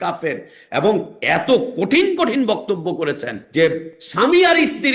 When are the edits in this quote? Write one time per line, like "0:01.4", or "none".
0:01.1
0:03.3
0:04.0